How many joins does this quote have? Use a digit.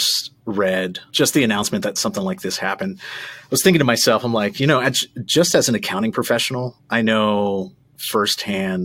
1